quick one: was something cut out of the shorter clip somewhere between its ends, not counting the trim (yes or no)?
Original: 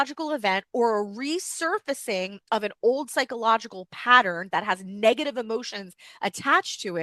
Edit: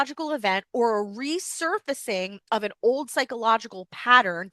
no